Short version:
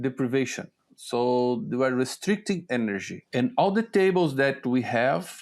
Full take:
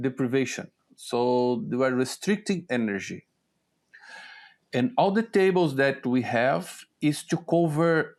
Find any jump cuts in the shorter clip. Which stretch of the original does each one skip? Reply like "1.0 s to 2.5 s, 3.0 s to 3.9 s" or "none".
3.2 s to 4.6 s